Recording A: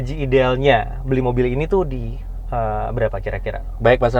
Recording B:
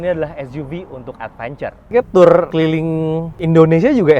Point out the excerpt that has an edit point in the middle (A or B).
B